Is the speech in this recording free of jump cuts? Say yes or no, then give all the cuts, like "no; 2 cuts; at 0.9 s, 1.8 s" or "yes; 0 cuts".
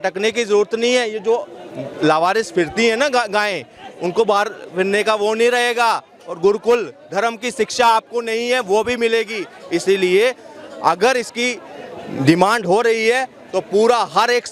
yes; 0 cuts